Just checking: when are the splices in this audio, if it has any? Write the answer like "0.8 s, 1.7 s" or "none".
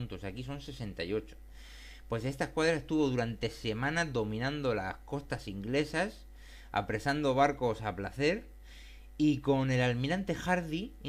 4.6 s